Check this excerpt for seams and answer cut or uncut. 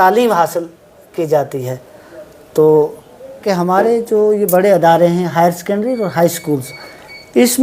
cut